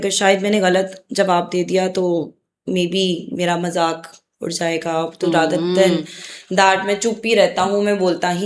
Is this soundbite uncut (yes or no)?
yes